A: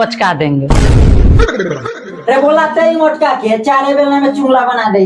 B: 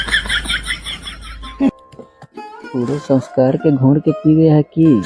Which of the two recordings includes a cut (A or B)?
B